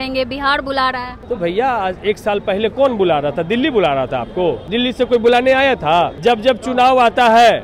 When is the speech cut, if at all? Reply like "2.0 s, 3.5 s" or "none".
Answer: 1.1 s, 4.6 s, 6.1 s